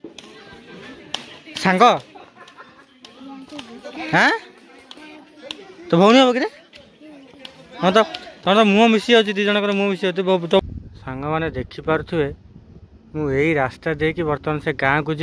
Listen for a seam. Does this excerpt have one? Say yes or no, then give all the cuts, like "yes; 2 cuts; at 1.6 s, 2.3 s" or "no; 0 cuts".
yes; 1 cut; at 10.6 s